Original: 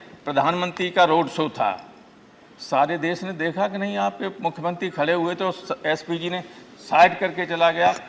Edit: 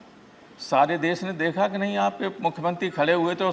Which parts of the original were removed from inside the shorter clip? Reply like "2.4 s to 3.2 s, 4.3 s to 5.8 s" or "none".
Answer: none